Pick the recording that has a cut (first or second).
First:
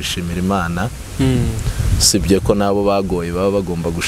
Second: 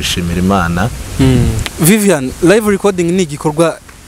second